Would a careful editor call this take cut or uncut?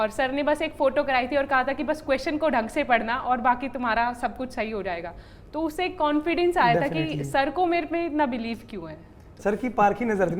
uncut